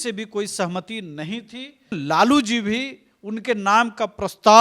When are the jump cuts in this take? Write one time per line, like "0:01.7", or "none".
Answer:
0:02.0